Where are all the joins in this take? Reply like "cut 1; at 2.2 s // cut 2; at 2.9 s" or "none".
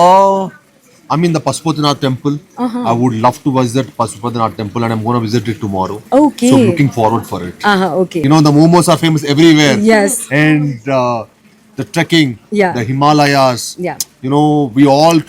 cut 1; at 8.2 s